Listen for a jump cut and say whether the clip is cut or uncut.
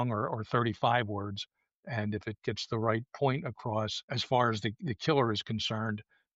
cut